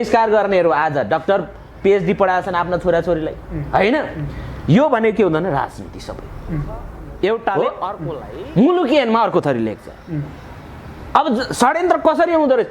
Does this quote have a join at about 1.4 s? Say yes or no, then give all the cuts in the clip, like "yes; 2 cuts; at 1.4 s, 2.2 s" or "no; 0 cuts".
no; 1 cut; at 8.1 s